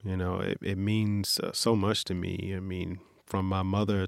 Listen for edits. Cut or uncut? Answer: uncut